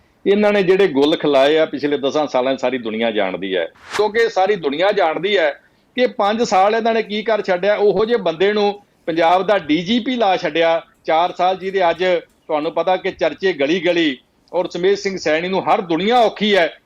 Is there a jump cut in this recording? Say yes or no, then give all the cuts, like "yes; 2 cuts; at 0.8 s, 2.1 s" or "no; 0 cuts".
yes; 1 cut; at 4.0 s